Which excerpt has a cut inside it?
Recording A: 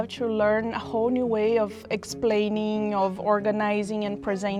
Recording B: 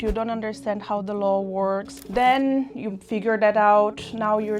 B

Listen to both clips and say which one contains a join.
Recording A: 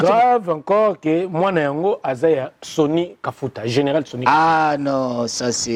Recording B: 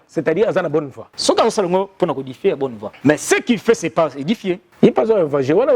B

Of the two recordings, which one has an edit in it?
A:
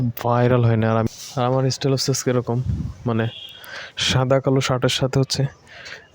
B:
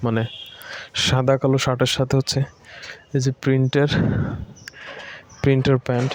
A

